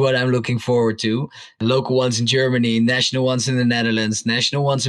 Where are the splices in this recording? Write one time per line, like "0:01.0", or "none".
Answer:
0:01.6